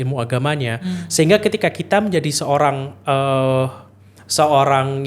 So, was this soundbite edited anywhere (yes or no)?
no